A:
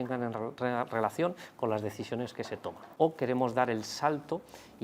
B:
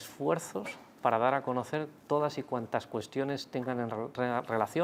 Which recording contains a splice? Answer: A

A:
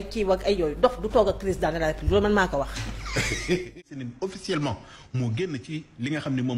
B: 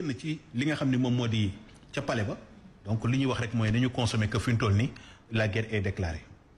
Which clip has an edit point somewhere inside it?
A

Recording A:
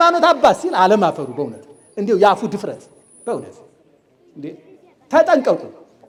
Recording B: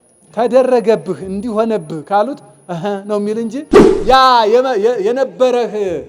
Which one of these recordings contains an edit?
B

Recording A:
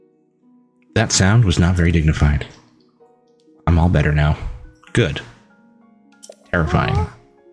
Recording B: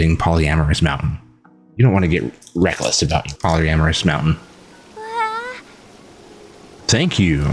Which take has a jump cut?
B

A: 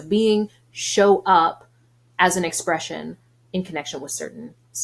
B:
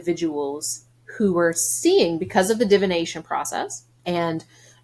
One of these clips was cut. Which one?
B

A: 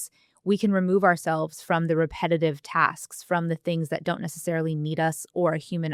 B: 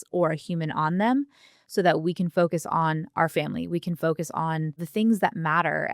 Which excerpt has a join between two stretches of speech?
B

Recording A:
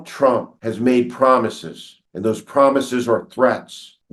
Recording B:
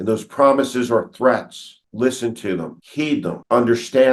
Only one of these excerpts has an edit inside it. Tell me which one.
B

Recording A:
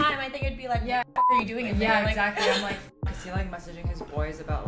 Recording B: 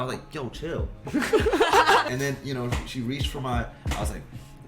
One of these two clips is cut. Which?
B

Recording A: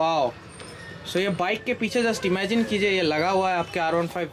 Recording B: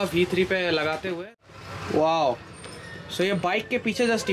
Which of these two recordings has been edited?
B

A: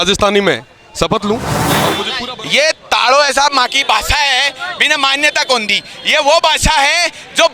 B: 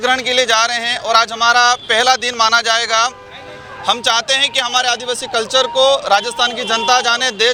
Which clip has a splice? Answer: A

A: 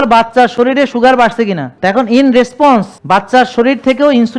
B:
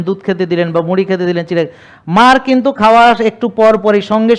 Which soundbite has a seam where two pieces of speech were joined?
A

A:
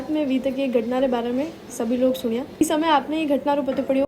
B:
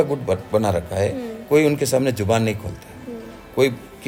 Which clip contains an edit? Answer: A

